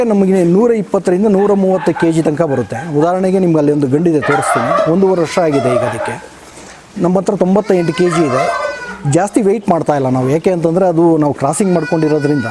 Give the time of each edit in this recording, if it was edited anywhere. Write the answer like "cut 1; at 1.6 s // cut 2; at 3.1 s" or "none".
none